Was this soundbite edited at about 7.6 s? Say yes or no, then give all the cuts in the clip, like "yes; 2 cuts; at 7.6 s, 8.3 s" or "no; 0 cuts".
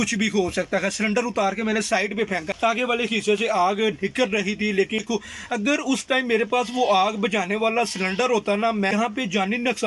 no; 3 cuts; at 2.5 s, 5.0 s, 8.9 s